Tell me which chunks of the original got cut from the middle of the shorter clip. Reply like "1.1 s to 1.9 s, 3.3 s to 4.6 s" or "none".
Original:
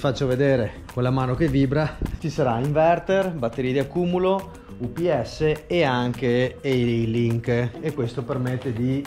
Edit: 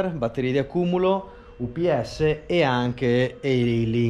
none